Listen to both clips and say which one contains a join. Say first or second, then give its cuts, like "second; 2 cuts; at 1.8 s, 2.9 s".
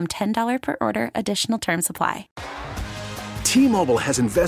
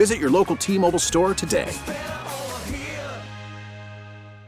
first; 1 cut; at 2.3 s